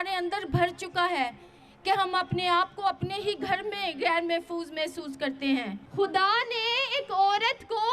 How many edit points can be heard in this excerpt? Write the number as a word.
one